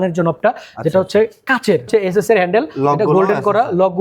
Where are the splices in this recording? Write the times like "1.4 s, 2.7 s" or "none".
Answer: 1.9 s